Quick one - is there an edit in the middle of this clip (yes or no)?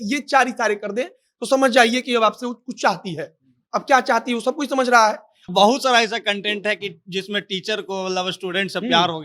yes